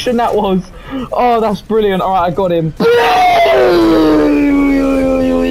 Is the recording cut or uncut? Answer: cut